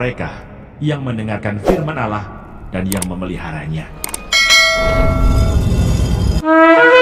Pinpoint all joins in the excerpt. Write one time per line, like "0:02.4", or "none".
none